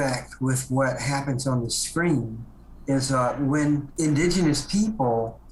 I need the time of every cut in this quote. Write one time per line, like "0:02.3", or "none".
0:03.9